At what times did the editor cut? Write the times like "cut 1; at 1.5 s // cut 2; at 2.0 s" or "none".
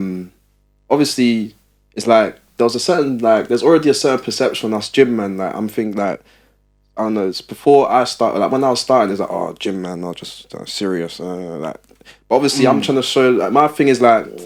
none